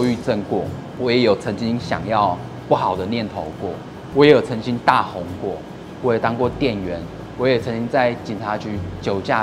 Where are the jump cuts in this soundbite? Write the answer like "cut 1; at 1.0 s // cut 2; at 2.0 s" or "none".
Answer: none